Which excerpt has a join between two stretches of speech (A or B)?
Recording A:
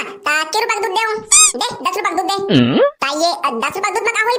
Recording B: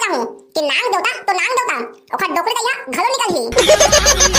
A